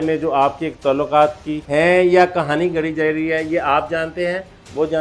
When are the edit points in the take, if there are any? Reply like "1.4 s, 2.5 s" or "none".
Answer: 1.5 s